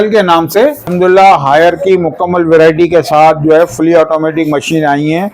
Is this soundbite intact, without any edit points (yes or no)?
no